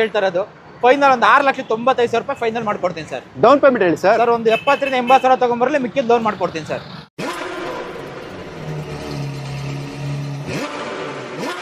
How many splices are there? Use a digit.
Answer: 0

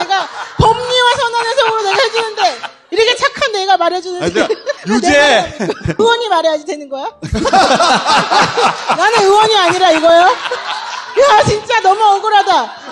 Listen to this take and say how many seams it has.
0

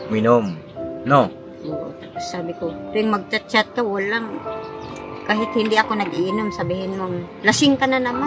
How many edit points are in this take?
0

